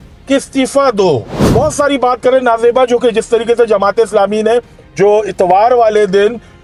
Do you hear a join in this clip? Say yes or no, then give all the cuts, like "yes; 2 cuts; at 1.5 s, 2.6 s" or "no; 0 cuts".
no; 0 cuts